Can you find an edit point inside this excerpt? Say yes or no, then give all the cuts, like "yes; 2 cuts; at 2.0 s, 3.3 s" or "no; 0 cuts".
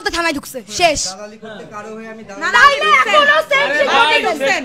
no; 0 cuts